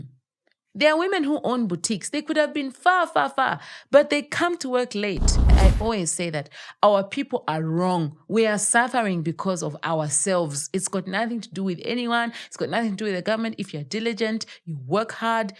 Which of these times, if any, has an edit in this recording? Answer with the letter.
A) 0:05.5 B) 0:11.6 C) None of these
A